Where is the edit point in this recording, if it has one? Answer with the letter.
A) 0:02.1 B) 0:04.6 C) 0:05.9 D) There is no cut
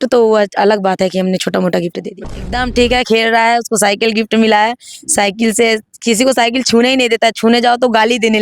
A